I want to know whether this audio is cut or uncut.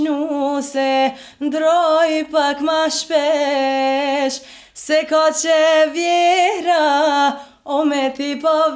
uncut